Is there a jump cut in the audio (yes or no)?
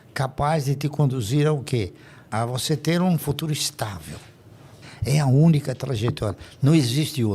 yes